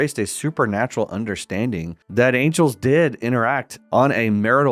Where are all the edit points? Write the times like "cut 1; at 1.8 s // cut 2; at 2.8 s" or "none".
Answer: cut 1; at 2.0 s // cut 2; at 3.7 s

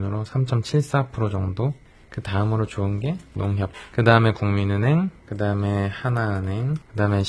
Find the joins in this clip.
none

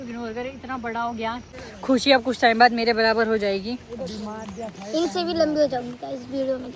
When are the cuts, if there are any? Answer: cut 1; at 1.4 s

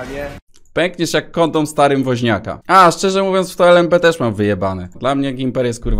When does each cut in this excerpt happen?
cut 1; at 2.5 s // cut 2; at 4.8 s

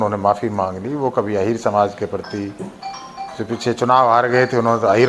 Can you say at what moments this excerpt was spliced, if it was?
none

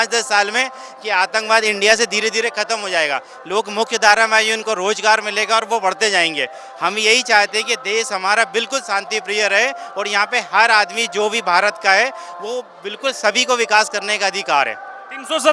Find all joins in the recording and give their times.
none

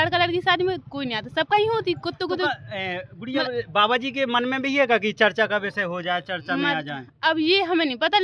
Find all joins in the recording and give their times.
none

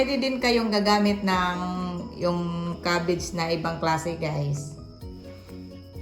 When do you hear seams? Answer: cut 1; at 4.7 s

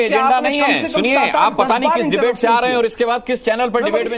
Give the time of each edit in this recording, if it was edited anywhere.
none

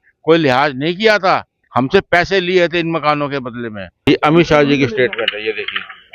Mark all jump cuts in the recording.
cut 1; at 3.9 s

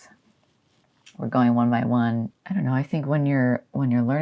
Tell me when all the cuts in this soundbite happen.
cut 1; at 2.3 s

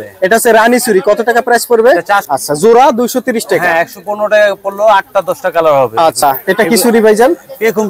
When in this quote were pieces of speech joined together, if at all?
cut 1; at 2.2 s // cut 2; at 6.2 s

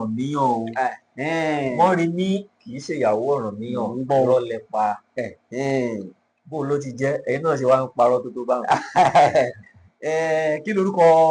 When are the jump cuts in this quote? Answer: none

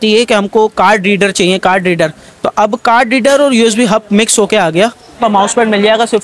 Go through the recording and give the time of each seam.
cut 1; at 5.2 s

